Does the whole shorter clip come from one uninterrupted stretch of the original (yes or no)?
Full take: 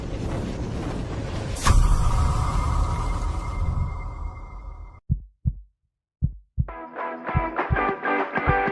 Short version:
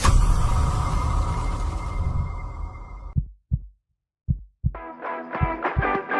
no